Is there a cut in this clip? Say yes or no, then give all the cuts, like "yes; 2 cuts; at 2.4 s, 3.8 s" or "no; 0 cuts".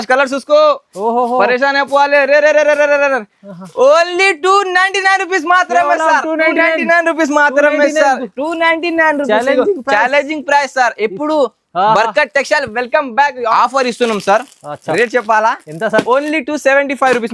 yes; 1 cut; at 13.5 s